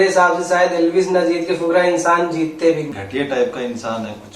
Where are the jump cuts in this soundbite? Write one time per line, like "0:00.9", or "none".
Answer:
0:03.0

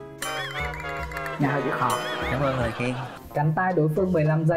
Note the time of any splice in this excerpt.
0:03.1

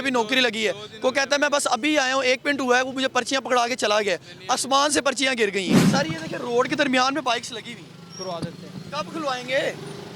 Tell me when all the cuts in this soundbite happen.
0:05.8

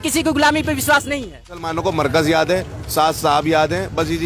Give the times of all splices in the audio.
0:01.7

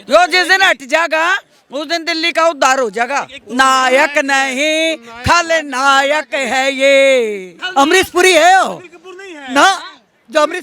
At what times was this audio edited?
0:03.4
0:07.6

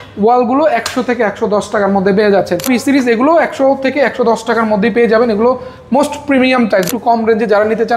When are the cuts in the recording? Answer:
0:02.7
0:06.9

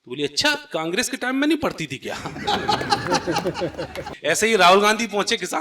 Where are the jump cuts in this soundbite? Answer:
0:04.1

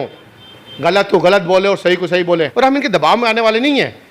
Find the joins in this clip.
0:02.5

